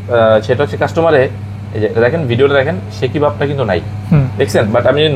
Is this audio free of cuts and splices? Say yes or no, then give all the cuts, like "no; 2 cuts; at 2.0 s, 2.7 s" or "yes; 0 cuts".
yes; 0 cuts